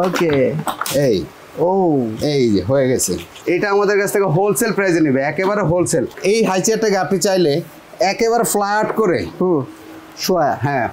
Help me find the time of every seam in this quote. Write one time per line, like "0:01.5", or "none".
0:03.3
0:06.1